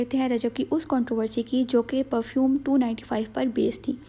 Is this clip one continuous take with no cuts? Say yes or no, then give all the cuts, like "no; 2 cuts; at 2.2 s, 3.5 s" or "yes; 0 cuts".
yes; 0 cuts